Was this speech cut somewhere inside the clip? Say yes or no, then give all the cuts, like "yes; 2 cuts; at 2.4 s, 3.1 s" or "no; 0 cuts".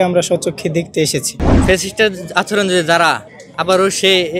yes; 1 cut; at 1.5 s